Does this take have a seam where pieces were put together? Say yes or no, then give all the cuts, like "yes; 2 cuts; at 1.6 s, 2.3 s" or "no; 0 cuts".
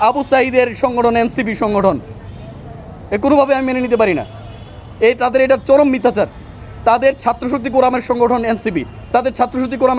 no; 0 cuts